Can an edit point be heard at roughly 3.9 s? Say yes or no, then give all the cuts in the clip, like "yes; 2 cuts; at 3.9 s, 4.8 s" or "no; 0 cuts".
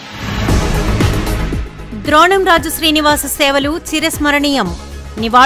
no; 1 cut; at 1.3 s